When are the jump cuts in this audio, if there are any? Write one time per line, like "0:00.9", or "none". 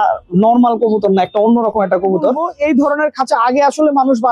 0:02.5